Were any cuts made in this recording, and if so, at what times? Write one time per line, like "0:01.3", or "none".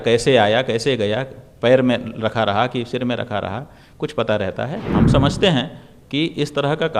0:04.9